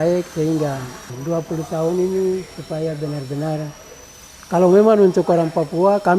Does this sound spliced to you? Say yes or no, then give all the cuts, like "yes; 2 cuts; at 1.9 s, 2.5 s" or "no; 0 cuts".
no; 0 cuts